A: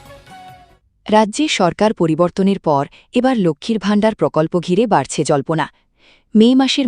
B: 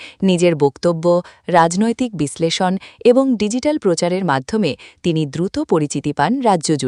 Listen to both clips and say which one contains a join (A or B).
A